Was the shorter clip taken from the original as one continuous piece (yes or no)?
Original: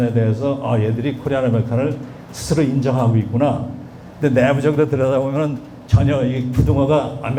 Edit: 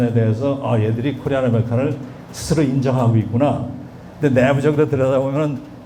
yes